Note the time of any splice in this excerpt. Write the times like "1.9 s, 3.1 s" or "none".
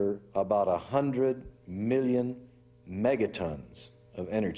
none